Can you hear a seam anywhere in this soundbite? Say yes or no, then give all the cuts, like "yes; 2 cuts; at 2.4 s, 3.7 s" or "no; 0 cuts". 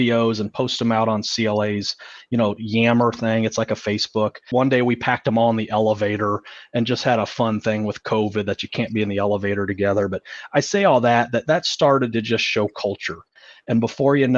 yes; 1 cut; at 4.4 s